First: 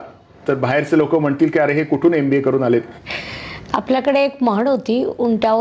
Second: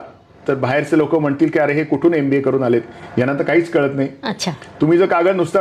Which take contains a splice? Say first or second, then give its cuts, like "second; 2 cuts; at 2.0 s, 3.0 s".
first; 1 cut; at 3.0 s